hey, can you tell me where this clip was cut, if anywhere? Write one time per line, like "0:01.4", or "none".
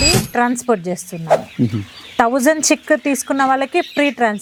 none